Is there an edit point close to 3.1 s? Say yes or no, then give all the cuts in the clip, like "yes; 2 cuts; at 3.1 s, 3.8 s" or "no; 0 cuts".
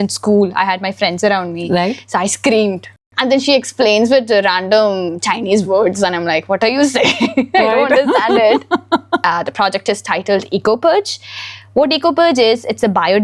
yes; 2 cuts; at 3.1 s, 9.2 s